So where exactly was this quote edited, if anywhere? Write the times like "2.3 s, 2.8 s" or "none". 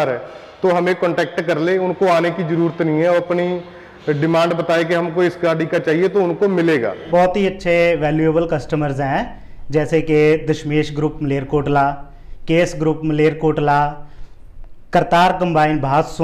7.0 s